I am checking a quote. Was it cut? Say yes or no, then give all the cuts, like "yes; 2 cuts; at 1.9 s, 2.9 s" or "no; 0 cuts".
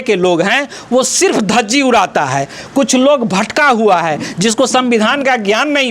no; 0 cuts